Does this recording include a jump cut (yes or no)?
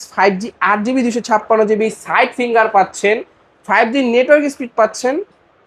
no